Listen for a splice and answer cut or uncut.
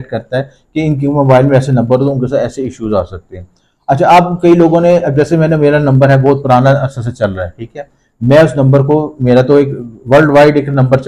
uncut